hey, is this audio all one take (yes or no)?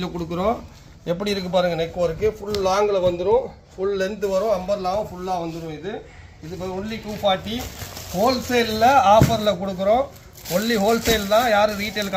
yes